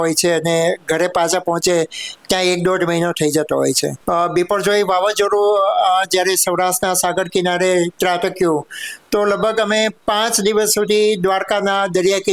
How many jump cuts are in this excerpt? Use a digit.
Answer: 1